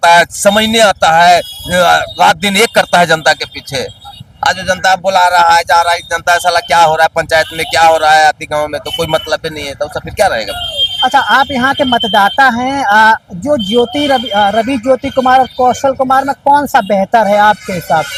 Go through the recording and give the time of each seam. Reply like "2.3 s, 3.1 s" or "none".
none